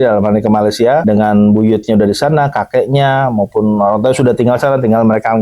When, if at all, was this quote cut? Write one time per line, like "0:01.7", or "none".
0:01.0